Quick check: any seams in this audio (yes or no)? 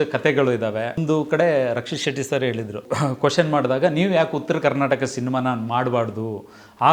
yes